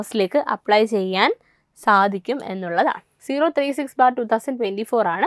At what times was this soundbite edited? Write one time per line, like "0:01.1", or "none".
0:03.2